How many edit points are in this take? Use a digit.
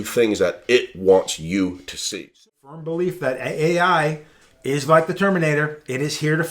1